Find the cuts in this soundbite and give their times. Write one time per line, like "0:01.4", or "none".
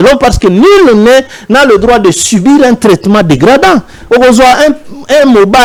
none